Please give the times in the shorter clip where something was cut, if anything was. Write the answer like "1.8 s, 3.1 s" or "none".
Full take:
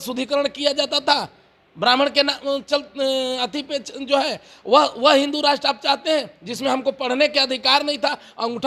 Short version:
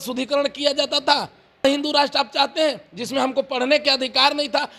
1.6 s